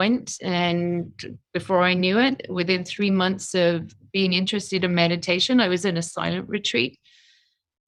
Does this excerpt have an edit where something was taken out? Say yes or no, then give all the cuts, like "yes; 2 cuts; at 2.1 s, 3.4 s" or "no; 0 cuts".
no; 0 cuts